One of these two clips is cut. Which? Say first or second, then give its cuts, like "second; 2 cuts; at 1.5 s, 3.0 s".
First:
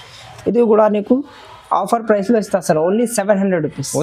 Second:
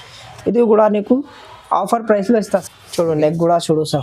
second; 1 cut; at 2.6 s